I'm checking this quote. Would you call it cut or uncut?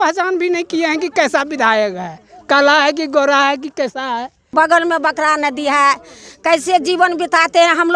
cut